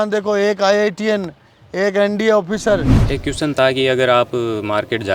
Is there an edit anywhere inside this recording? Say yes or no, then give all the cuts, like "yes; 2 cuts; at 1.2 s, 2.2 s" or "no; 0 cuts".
yes; 1 cut; at 3.0 s